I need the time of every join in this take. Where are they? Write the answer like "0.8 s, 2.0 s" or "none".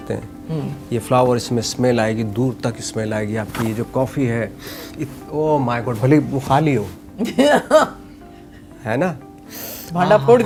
none